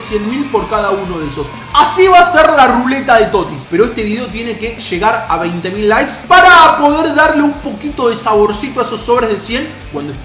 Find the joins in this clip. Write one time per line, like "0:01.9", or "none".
0:03.6